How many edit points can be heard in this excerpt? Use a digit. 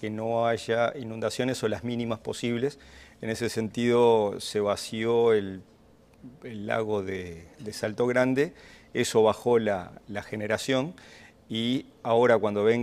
1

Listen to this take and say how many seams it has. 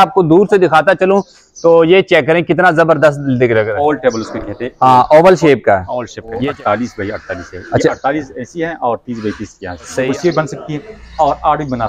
3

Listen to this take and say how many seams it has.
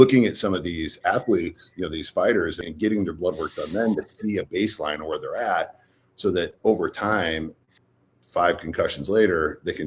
2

